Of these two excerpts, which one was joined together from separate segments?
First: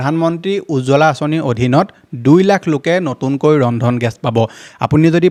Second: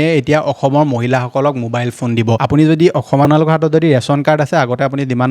second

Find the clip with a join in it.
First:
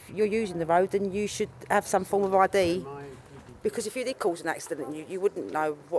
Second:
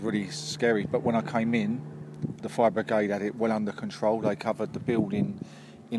second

